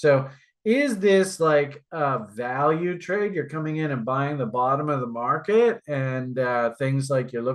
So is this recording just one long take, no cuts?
yes; 0 cuts

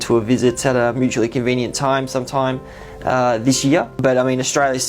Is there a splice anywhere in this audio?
yes; 1 cut; at 4.0 s

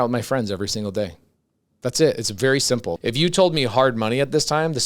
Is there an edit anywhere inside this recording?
yes; 1 cut; at 2.9 s

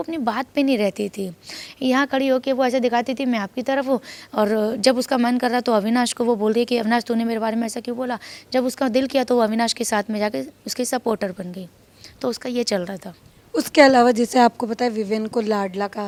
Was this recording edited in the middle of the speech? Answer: no; 0 cuts

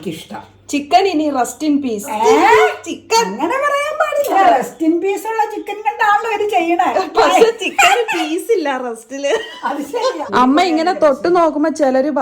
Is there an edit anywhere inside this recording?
yes; 3 cuts; at 2.1 s, 4.3 s, 10.2 s

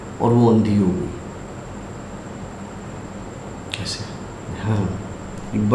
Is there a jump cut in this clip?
no; 0 cuts

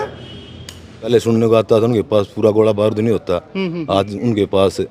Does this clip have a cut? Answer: yes; 1 cut; at 1.1 s

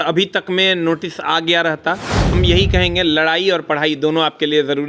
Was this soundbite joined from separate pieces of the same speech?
yes; 1 cut; at 2.3 s

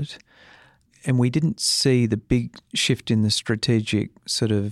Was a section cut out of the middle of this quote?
no; 0 cuts

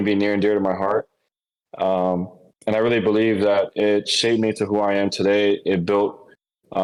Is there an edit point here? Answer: no; 0 cuts

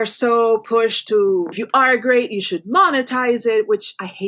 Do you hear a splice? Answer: yes; 1 cut; at 1.6 s

